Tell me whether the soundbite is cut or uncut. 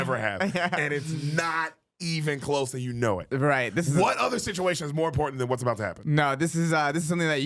uncut